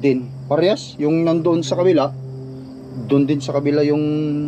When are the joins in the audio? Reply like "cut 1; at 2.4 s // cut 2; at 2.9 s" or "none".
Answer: none